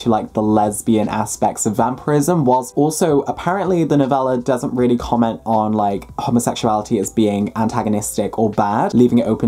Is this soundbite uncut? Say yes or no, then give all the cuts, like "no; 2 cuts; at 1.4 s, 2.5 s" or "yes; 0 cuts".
yes; 0 cuts